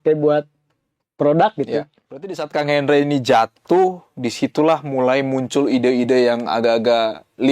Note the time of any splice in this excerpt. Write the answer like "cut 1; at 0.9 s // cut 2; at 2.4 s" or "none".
cut 1; at 2.4 s